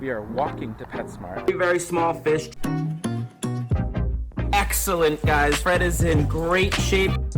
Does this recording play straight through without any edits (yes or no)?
yes